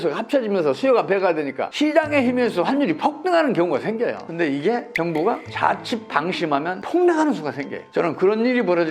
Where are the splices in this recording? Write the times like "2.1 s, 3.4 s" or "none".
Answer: 7.7 s